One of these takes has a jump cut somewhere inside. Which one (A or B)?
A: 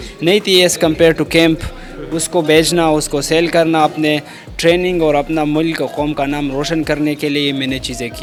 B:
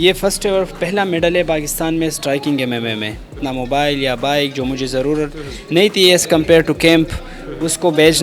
B